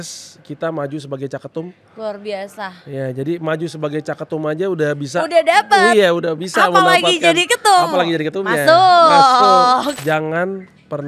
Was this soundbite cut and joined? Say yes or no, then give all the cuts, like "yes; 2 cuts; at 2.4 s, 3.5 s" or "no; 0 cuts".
yes; 1 cut; at 10.0 s